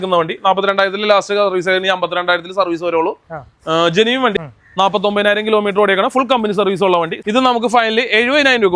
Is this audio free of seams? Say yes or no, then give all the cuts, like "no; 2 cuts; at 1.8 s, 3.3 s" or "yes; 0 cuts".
no; 2 cuts; at 4.4 s, 7.2 s